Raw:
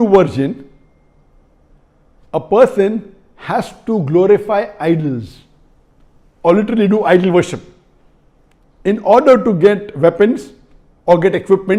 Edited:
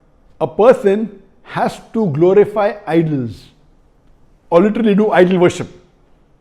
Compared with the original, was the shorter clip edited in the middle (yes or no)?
no